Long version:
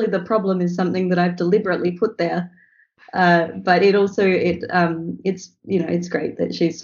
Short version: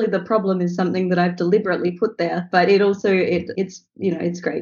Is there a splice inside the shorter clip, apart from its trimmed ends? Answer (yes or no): yes